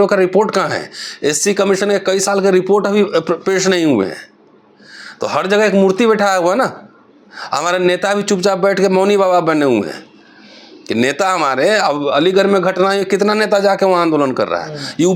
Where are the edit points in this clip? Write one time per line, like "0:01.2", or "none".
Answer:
none